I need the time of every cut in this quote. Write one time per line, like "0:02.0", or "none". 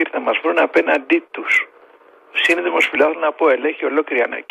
none